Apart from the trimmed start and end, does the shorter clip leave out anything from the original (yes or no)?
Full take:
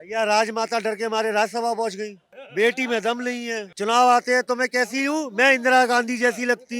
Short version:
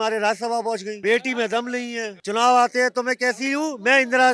yes